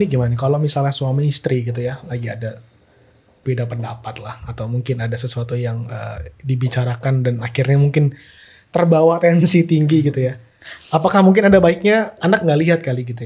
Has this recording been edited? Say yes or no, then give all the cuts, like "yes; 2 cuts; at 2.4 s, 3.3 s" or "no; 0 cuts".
no; 0 cuts